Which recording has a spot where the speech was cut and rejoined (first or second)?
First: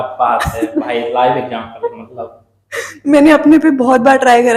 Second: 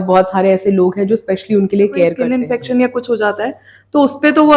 second